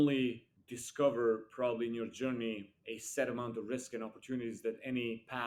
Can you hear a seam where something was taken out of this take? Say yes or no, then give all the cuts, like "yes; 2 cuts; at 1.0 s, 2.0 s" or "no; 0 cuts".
no; 0 cuts